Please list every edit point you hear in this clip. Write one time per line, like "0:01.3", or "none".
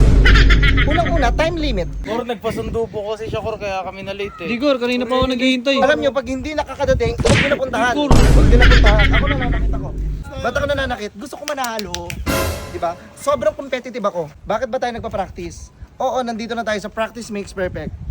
0:02.0
0:10.2
0:14.4